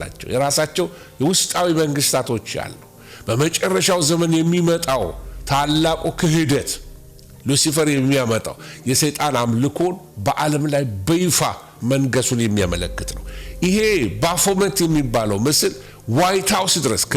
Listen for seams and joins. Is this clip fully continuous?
no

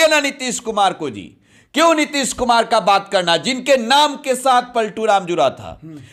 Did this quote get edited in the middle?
no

